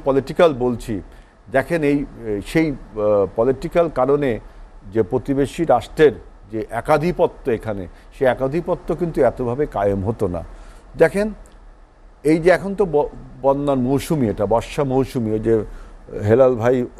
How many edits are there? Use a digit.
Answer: 0